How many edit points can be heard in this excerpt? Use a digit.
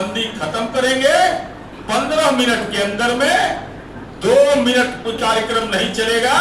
0